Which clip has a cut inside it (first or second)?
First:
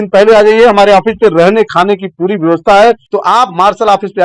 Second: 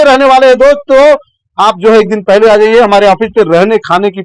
first